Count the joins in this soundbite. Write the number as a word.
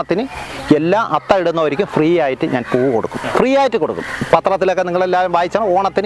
one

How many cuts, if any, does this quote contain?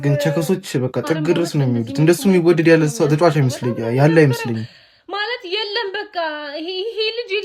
zero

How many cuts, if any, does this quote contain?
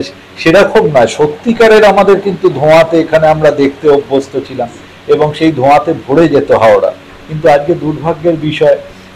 zero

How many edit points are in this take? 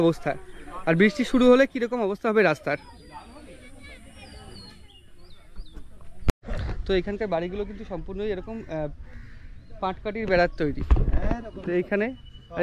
zero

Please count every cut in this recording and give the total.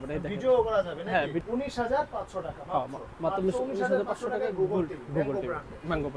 one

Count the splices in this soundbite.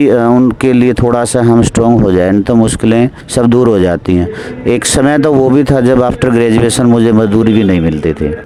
zero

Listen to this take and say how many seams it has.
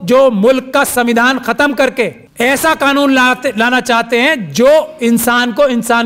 one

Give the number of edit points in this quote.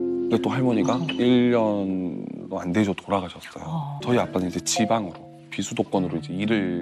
one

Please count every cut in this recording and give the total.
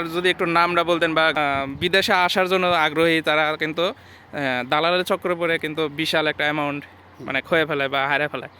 one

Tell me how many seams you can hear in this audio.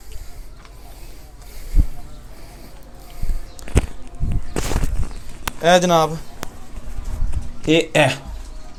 zero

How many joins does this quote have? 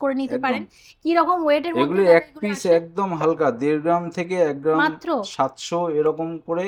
zero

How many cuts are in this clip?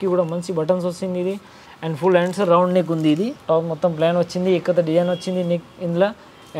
one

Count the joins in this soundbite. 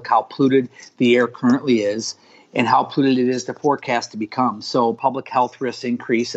one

